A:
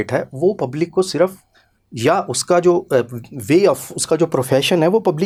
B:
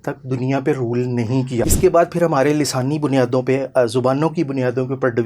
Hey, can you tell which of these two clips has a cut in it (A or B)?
B